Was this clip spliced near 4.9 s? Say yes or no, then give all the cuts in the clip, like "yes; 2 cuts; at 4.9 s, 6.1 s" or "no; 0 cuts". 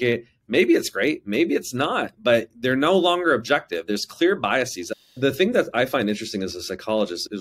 yes; 1 cut; at 4.9 s